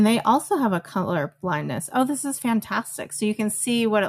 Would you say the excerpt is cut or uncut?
uncut